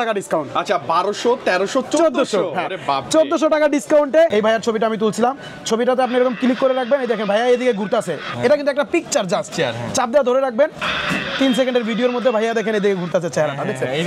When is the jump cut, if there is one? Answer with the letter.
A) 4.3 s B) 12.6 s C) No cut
A